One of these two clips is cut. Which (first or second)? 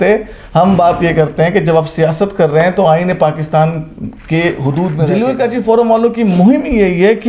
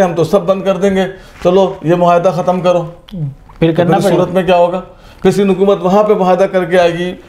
first